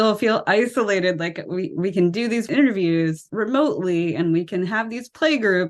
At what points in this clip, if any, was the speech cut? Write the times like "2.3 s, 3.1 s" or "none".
2.5 s, 3.2 s